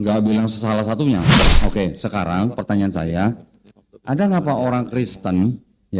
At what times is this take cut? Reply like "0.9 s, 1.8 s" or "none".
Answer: 1.4 s